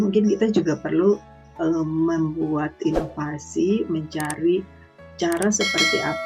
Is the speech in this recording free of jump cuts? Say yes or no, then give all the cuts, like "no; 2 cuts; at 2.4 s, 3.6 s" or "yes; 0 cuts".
yes; 0 cuts